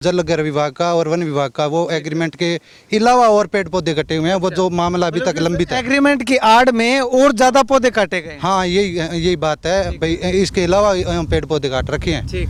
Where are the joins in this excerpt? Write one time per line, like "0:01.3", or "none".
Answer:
none